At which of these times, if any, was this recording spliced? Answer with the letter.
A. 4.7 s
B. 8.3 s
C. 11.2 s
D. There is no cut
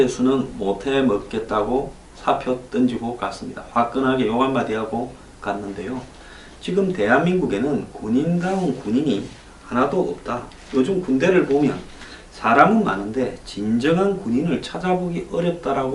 A